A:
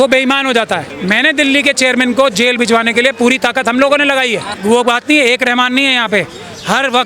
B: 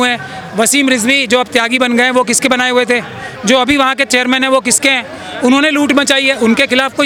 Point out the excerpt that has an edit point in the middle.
A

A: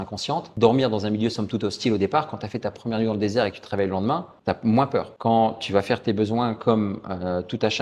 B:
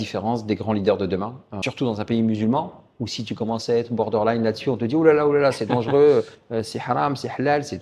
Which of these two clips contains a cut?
B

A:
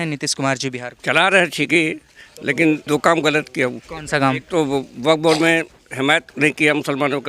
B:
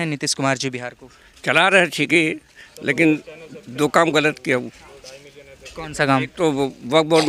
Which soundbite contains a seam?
A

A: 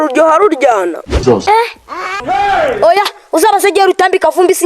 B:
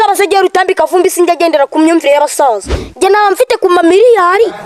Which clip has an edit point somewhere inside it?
A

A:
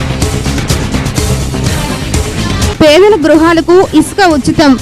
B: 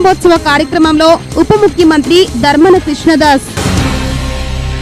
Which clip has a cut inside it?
A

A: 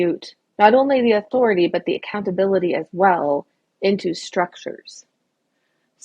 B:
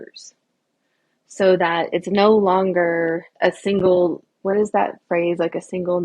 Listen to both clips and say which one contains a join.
B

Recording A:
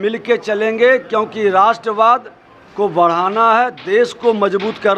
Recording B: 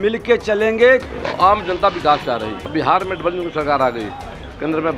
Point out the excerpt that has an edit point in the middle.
B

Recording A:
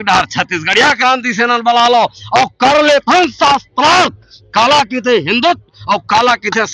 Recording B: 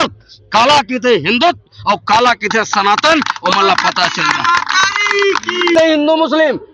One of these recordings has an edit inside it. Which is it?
B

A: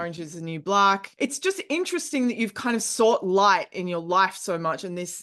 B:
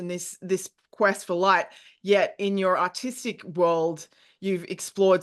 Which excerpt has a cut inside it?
A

